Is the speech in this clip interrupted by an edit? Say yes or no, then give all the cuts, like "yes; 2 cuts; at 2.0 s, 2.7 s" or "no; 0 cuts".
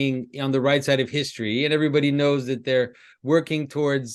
no; 0 cuts